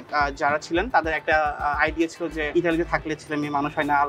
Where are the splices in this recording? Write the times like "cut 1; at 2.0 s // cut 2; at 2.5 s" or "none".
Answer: none